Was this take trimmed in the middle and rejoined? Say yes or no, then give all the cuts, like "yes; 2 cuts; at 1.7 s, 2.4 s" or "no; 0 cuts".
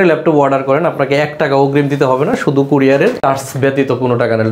no; 0 cuts